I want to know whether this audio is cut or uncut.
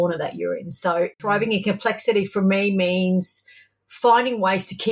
uncut